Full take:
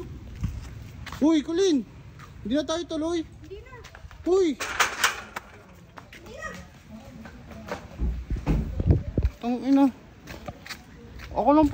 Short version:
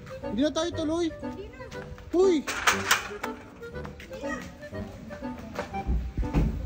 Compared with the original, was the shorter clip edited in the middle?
no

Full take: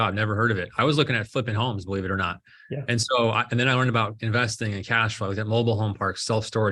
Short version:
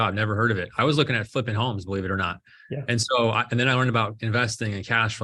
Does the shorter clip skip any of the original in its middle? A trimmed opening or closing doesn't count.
no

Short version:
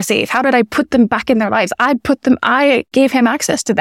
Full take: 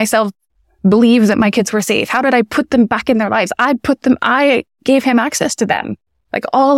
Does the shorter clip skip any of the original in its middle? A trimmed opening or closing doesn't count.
yes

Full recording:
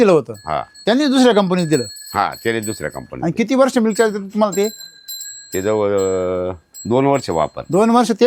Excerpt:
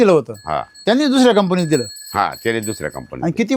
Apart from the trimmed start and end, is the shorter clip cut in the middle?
no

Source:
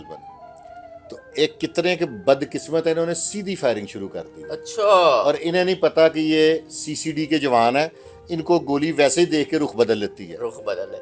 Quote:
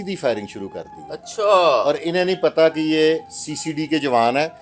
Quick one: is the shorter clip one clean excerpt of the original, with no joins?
yes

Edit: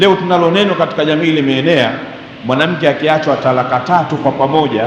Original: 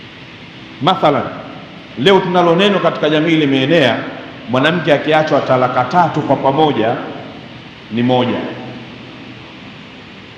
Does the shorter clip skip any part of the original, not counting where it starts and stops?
no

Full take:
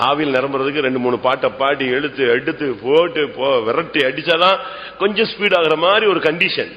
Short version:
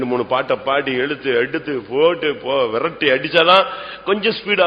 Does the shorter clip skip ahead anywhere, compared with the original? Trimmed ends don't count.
no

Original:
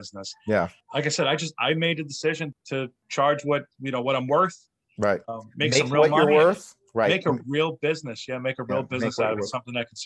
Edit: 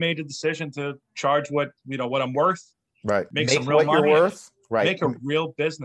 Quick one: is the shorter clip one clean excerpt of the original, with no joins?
no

